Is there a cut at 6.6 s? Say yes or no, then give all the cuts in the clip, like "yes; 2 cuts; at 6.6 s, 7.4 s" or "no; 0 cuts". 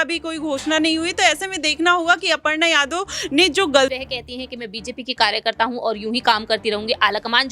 no; 1 cut; at 3.9 s